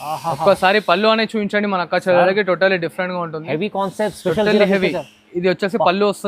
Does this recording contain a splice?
no; 0 cuts

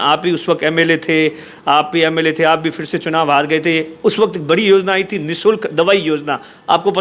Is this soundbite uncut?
yes; 0 cuts

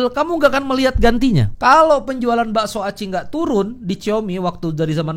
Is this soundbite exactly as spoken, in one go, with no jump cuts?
no; 1 cut; at 1.5 s

